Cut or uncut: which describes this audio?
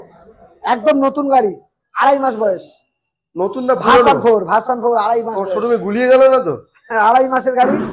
uncut